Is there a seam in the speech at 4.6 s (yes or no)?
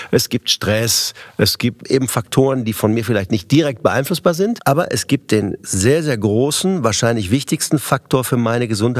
yes